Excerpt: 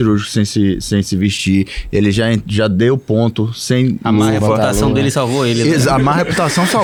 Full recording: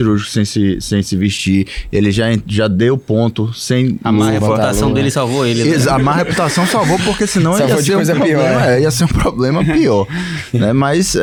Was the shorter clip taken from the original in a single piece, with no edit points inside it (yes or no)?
yes